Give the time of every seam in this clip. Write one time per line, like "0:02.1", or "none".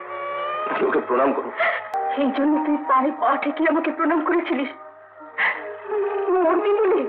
0:01.9